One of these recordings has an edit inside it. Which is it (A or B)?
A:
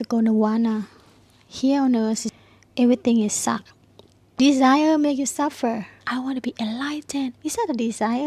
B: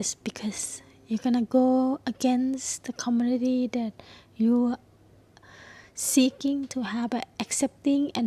A